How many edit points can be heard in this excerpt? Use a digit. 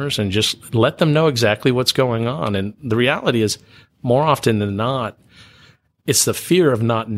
0